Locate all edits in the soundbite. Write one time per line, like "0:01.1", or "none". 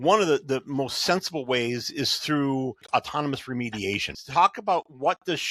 0:02.8
0:04.1